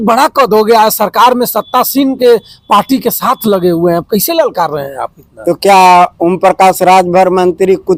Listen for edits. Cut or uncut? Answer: uncut